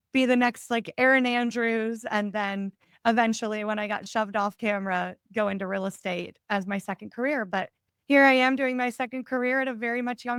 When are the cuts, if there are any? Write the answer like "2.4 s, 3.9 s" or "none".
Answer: none